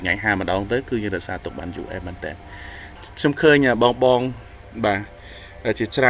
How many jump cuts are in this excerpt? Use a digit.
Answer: 1